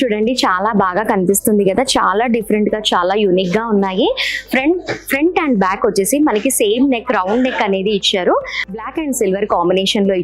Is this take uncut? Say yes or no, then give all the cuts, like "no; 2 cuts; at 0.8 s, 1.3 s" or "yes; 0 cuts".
no; 1 cut; at 8.6 s